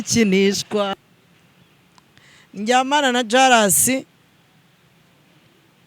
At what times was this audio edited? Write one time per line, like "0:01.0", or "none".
0:00.9